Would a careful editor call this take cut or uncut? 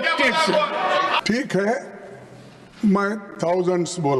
cut